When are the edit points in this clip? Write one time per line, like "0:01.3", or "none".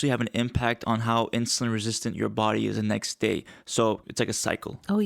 0:04.0